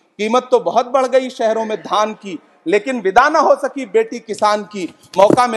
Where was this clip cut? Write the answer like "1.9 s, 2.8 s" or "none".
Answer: none